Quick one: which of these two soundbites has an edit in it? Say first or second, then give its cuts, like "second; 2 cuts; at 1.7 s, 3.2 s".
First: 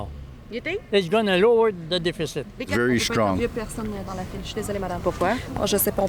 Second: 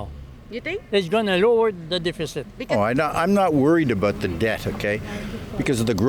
first; 1 cut; at 2.7 s